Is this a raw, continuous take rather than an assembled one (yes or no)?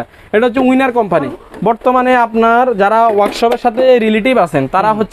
no